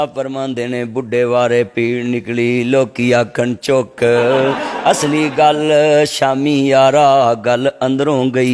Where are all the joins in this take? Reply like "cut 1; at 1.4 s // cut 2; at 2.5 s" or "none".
none

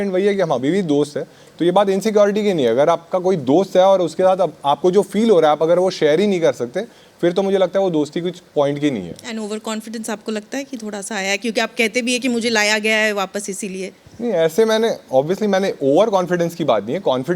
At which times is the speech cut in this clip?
none

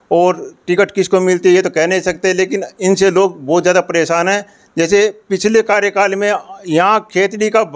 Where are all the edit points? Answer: none

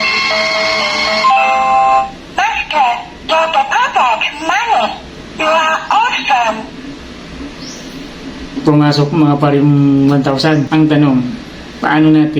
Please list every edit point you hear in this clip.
cut 1; at 10.7 s

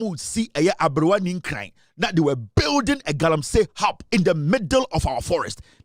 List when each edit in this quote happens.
cut 1; at 4.0 s

